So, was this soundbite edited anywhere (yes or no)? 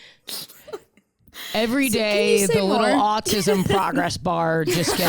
yes